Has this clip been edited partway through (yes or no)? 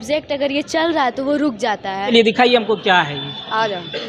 yes